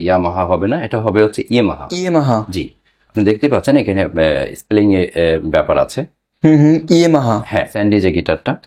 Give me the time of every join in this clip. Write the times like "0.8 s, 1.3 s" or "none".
7.7 s